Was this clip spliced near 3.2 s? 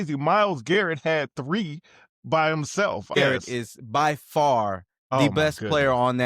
yes; 1 cut; at 3.2 s

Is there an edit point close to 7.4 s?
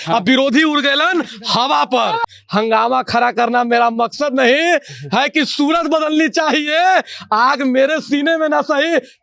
no; 1 cut; at 2.2 s

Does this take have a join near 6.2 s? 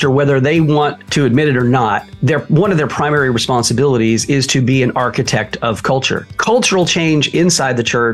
yes; 3 cuts; at 1.0 s, 2.1 s, 6.2 s

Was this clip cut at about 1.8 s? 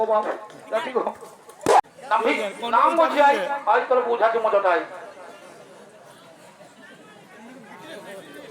yes; 1 cut; at 1.8 s

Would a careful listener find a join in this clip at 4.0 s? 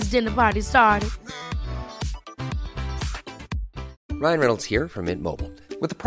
yes; 1 cut; at 4.0 s

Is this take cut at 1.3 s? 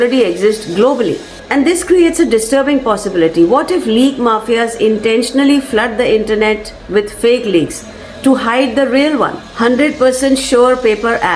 yes; 2 cuts; at 1.3 s, 9.4 s

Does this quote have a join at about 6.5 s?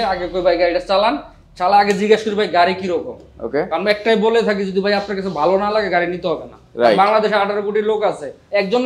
no; 0 cuts

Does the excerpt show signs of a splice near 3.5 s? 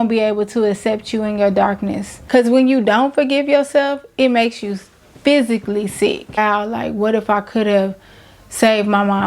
no; 2 cuts; at 2.1 s, 6.4 s

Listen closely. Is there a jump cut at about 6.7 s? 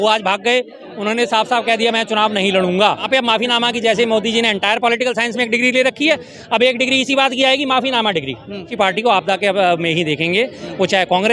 no; 2 cuts; at 3.1 s, 8.7 s

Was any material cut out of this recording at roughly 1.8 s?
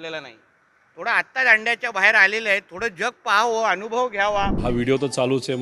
no; 1 cut; at 4.6 s

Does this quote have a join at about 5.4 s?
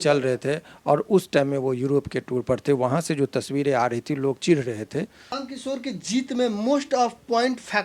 yes; 1 cut; at 5.4 s

